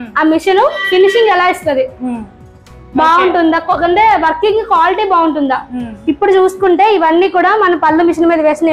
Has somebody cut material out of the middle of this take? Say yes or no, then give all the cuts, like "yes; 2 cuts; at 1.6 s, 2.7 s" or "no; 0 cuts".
no; 0 cuts